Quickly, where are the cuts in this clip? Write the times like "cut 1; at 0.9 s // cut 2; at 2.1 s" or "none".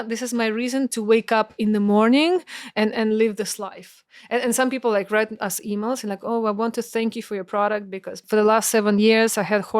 cut 1; at 8.2 s